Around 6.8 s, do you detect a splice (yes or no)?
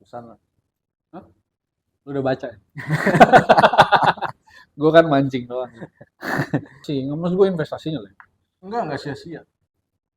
yes